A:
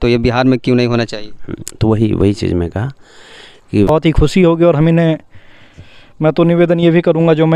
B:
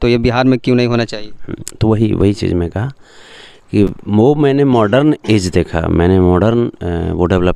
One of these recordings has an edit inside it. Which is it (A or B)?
A